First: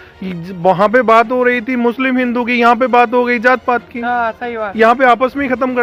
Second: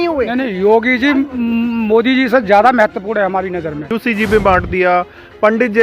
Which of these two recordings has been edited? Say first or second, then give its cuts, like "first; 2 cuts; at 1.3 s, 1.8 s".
second; 1 cut; at 3.9 s